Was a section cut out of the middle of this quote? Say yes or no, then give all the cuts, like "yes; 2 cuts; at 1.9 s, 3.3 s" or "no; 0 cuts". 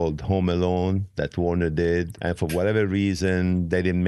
yes; 1 cut; at 2.2 s